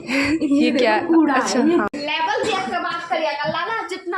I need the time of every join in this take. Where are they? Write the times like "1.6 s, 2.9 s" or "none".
1.9 s